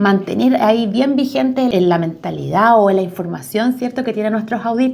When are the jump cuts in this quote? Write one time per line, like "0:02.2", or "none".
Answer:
0:01.7